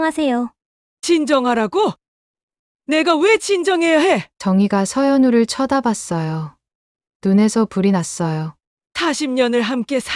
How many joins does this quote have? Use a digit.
0